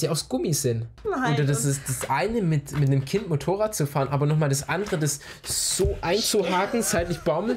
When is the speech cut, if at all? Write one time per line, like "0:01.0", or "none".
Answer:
0:00.9